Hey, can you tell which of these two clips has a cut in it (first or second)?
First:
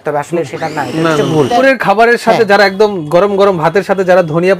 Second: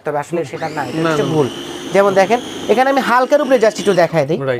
first